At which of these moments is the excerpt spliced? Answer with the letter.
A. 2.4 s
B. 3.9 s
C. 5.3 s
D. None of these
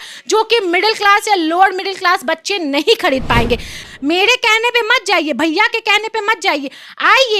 B